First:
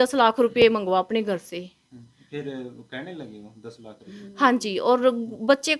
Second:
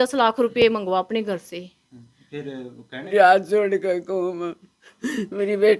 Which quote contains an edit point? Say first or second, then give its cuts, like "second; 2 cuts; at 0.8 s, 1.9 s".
second; 1 cut; at 3.1 s